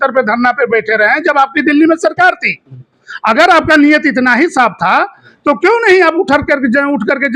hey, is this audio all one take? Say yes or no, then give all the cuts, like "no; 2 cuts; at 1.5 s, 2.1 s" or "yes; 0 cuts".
yes; 0 cuts